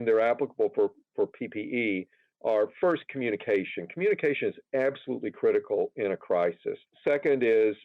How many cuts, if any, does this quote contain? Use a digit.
1